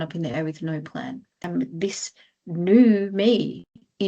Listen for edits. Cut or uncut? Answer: cut